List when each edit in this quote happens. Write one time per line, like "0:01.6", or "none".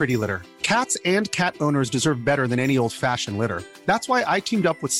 none